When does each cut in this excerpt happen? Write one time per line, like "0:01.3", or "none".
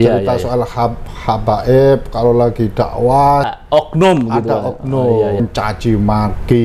0:03.5
0:05.4